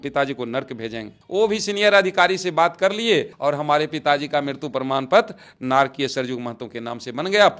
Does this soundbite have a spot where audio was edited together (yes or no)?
no